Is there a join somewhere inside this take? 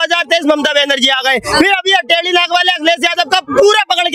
no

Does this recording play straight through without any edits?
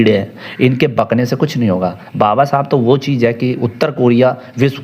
yes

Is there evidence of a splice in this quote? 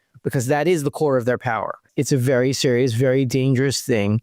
yes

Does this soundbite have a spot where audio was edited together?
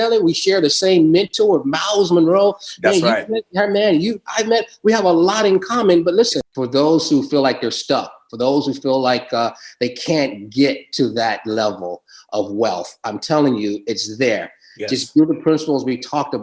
yes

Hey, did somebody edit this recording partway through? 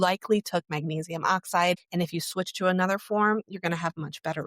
yes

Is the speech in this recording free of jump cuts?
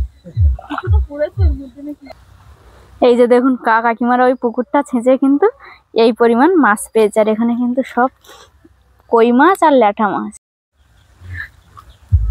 no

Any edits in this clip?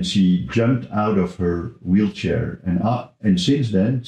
no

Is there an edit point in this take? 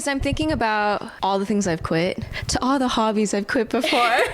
yes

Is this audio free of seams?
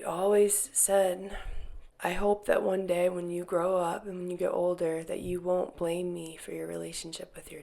no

